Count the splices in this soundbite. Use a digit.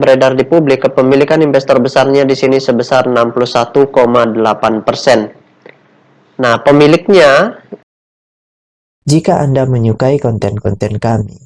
0